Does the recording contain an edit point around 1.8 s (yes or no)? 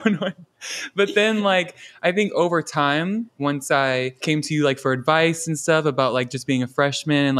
no